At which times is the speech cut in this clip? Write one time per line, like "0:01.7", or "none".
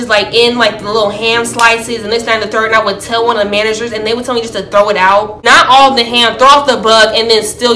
none